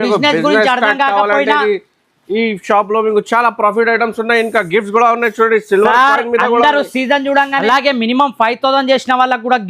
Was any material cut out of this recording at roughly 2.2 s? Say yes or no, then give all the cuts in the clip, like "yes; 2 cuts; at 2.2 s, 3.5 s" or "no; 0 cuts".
no; 1 cut; at 7.6 s